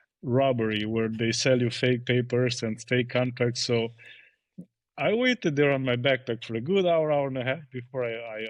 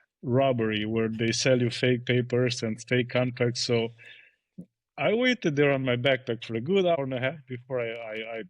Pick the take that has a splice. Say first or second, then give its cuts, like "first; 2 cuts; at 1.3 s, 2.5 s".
second; 1 cut; at 7.0 s